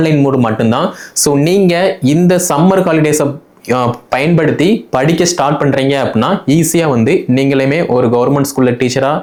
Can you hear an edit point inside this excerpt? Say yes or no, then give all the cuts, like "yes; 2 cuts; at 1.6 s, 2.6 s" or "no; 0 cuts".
no; 0 cuts